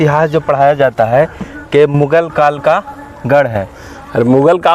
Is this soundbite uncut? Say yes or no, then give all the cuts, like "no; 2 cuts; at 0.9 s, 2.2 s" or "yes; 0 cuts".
yes; 0 cuts